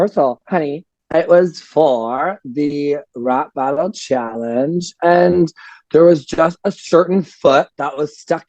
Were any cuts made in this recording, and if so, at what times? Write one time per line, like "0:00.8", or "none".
0:01.0